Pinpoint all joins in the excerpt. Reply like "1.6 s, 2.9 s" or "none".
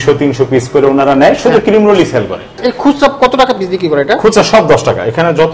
2.5 s